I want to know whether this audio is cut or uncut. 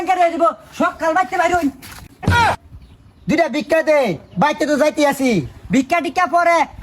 uncut